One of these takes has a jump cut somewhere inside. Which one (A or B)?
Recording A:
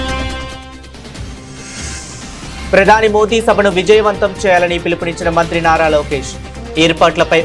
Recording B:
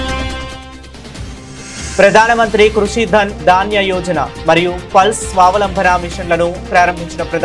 B